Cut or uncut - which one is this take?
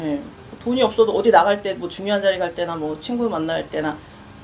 uncut